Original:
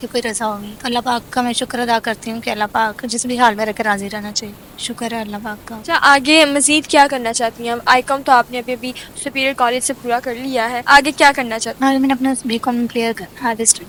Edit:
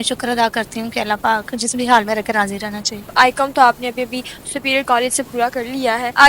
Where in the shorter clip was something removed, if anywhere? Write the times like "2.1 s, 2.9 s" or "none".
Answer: 3.1 s